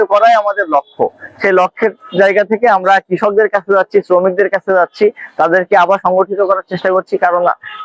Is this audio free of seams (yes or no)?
yes